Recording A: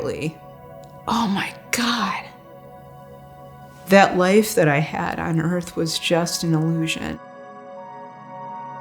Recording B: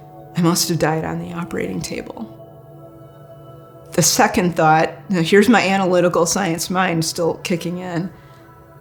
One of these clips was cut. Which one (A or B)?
A